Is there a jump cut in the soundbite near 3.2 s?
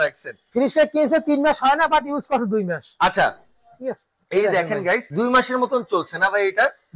no; 1 cut; at 5.1 s

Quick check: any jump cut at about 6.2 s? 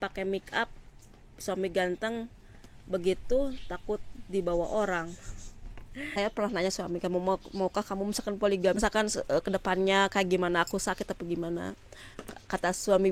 yes; 2 cuts; at 6.2 s, 8.8 s

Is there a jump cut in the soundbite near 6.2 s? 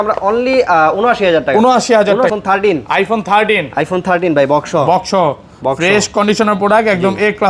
no; 1 cut; at 2.3 s

